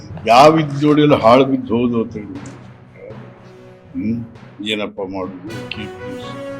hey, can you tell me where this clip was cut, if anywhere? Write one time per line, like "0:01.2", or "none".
0:05.5